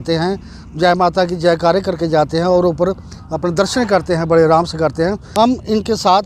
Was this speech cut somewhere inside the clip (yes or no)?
yes